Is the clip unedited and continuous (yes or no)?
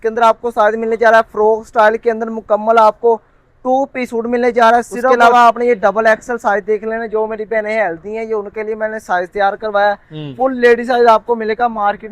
no